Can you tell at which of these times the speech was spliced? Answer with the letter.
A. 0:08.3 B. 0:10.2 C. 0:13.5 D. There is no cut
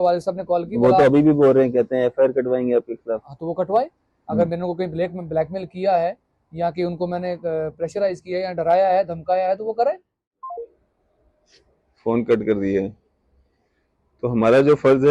B